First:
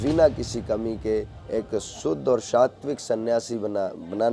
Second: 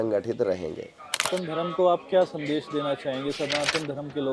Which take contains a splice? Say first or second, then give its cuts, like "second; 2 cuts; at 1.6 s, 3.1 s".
second; 1 cut; at 1.3 s